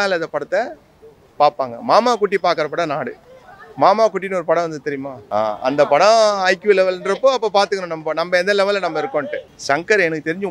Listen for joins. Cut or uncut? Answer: cut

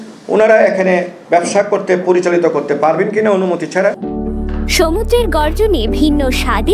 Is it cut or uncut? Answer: uncut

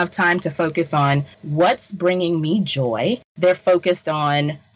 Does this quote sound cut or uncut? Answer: cut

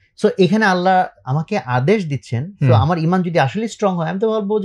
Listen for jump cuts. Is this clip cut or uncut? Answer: uncut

